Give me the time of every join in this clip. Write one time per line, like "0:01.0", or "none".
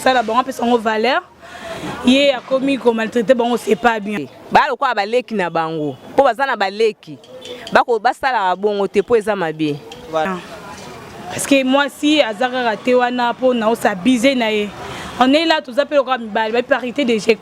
0:04.2
0:10.3